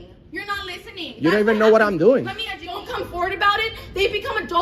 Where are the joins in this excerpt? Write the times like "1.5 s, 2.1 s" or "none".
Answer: none